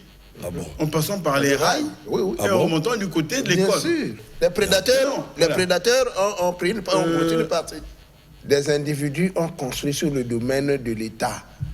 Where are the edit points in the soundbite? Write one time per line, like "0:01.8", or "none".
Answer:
0:04.2
0:07.8